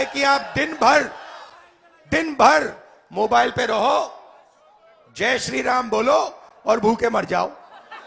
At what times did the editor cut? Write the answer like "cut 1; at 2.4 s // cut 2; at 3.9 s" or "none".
none